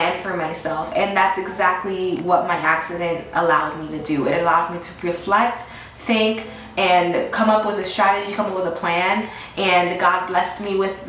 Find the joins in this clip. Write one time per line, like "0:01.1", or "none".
none